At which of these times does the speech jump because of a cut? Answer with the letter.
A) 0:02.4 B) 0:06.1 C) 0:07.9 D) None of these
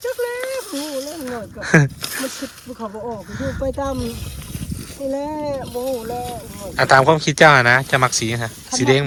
D